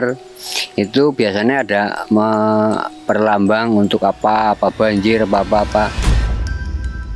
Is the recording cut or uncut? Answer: cut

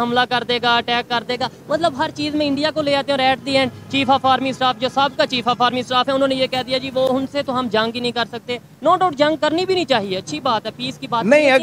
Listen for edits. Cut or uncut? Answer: uncut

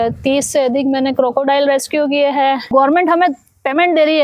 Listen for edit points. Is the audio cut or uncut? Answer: cut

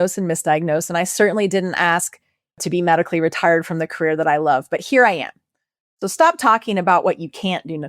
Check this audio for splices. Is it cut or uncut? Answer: cut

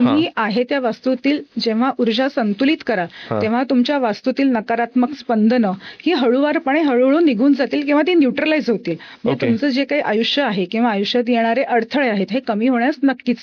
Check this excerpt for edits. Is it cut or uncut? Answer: uncut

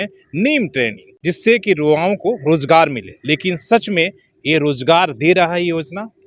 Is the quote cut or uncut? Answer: cut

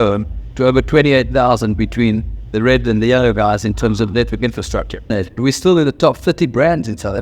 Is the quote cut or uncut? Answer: cut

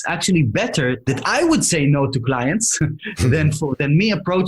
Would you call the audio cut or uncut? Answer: cut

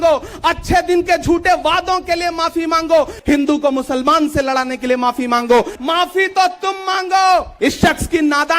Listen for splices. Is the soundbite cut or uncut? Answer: cut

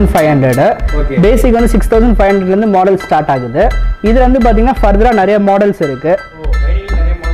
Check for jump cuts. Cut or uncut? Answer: uncut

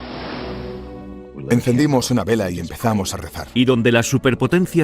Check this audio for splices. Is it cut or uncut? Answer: uncut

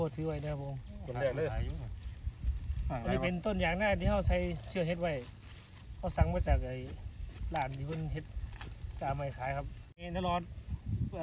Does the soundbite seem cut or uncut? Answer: cut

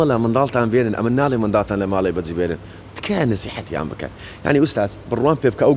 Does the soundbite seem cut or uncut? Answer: uncut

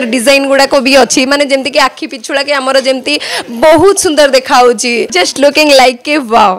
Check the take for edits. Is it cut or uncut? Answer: cut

